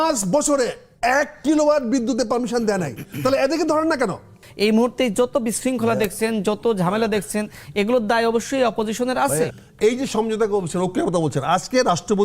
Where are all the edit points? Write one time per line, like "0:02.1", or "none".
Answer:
0:04.4
0:09.6